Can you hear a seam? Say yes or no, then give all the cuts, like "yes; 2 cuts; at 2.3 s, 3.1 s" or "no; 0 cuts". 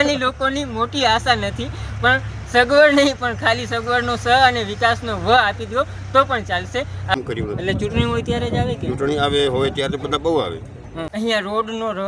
yes; 2 cuts; at 7.1 s, 11.0 s